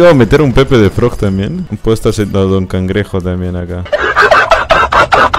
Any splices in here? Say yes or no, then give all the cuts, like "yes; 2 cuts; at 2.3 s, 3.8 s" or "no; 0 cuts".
no; 0 cuts